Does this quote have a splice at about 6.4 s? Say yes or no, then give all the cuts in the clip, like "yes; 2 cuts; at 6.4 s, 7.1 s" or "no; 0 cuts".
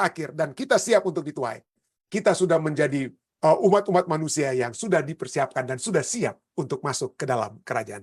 no; 1 cut; at 3.2 s